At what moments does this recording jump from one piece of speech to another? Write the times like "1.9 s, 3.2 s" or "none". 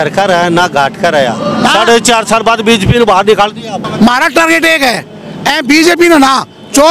3.9 s